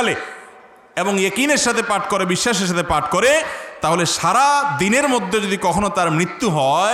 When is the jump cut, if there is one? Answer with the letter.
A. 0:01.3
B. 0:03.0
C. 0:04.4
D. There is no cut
D